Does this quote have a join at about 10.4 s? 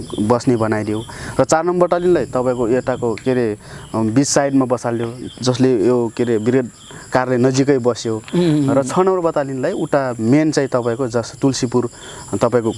no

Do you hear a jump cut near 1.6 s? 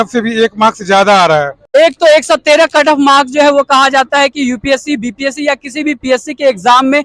yes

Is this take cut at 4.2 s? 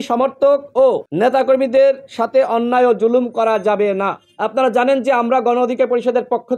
yes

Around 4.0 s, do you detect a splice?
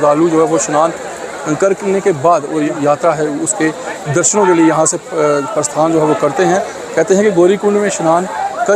no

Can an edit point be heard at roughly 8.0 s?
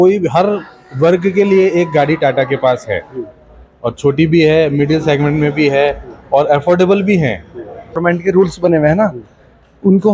yes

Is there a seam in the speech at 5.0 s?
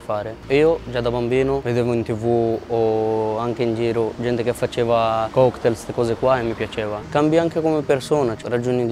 no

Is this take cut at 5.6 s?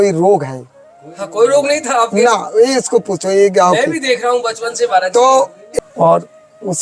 yes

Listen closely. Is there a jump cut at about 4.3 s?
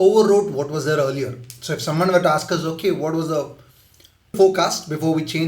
yes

